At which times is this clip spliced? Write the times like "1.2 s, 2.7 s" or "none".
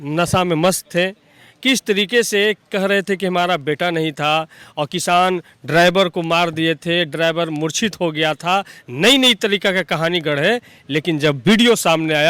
none